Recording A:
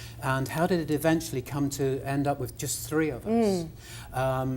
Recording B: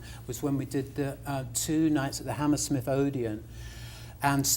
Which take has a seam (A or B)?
A